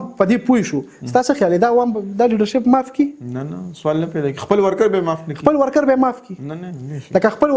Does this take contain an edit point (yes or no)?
no